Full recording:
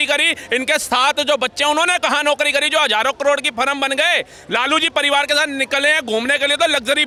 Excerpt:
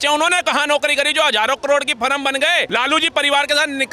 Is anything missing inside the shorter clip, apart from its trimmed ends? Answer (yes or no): yes